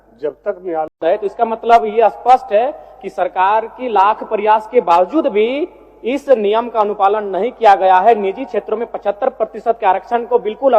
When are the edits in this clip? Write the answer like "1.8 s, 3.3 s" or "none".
1.0 s